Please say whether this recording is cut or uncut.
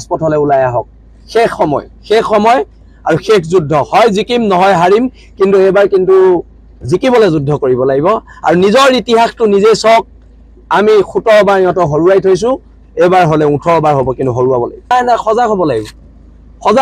uncut